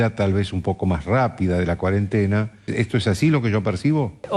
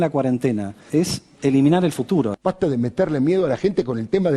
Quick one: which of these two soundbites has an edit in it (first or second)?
second